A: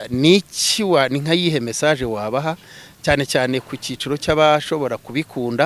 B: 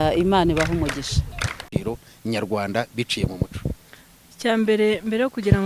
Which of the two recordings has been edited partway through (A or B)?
B